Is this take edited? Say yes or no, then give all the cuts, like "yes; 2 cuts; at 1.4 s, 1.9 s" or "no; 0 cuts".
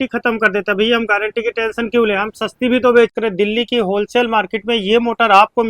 yes; 1 cut; at 3.1 s